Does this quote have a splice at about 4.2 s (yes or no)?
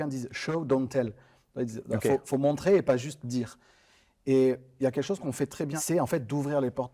no